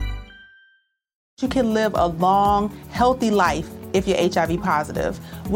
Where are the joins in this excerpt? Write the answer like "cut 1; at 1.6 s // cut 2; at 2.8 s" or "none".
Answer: cut 1; at 1.3 s